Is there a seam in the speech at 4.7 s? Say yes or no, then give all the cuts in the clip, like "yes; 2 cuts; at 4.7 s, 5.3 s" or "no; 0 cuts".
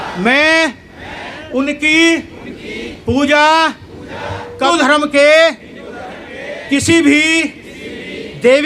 yes; 1 cut; at 4.7 s